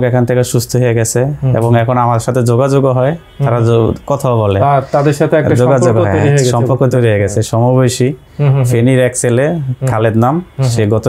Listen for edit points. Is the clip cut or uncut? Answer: uncut